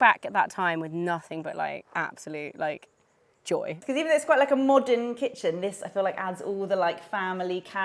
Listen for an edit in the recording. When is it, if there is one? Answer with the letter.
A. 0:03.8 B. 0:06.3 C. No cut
A